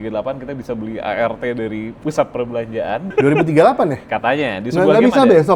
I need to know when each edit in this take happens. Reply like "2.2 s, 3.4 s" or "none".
1.9 s, 3.1 s